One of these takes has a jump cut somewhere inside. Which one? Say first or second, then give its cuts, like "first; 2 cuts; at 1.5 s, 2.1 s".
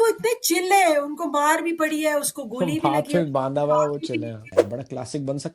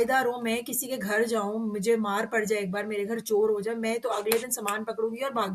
first; 1 cut; at 4.6 s